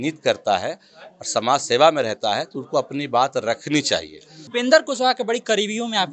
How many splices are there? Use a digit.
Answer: 1